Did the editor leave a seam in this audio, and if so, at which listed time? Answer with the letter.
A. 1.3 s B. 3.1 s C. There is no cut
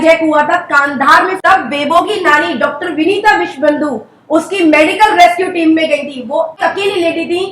A